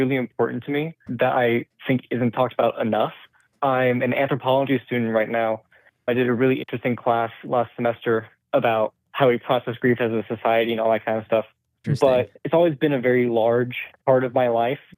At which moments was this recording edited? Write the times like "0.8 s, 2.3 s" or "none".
1.0 s, 5.9 s, 11.8 s